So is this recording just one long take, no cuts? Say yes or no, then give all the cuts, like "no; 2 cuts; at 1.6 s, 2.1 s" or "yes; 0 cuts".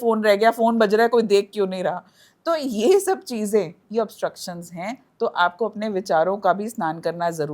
yes; 0 cuts